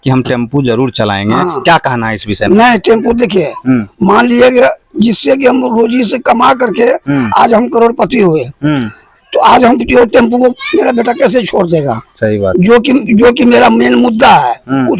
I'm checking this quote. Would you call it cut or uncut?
uncut